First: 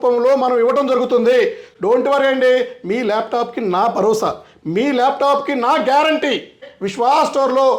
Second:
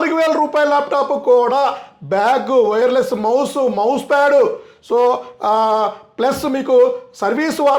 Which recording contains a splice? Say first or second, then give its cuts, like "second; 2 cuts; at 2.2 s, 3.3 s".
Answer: first; 2 cuts; at 1.7 s, 6.7 s